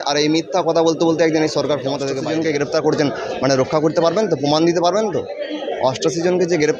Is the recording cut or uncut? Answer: cut